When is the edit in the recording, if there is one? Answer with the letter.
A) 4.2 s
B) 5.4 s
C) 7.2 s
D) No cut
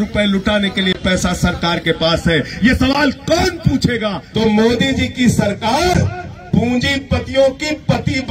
A